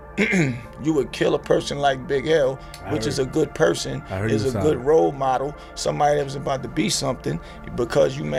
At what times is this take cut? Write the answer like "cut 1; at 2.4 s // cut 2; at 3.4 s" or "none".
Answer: none